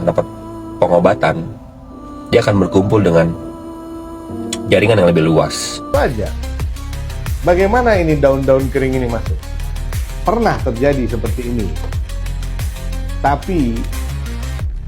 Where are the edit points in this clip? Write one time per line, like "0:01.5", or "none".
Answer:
0:05.9